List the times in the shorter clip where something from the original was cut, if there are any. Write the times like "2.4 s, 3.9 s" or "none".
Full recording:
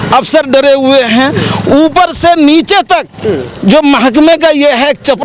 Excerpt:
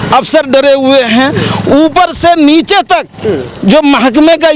none